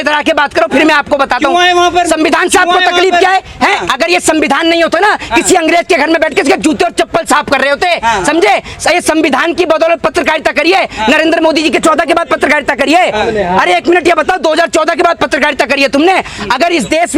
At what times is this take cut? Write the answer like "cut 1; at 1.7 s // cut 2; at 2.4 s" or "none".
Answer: none